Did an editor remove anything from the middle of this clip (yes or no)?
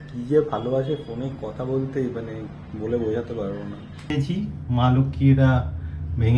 yes